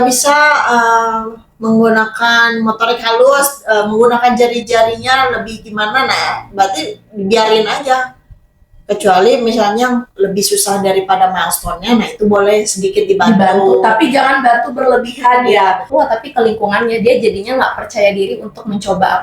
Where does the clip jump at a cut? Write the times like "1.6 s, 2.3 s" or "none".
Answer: 15.9 s